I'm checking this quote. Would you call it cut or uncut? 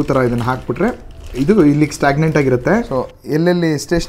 cut